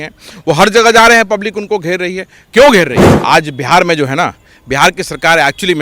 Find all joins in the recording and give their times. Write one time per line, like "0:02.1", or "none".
0:03.1